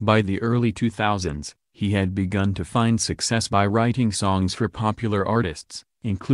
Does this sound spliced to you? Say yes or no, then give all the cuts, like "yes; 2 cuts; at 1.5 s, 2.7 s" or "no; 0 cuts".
yes; 2 cuts; at 1.9 s, 4.9 s